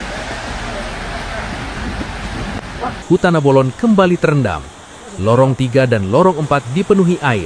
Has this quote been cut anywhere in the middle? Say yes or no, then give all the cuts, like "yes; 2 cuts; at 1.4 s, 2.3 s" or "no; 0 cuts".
yes; 1 cut; at 3.0 s